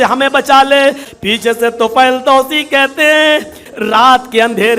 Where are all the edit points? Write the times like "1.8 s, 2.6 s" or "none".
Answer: 1.1 s, 3.6 s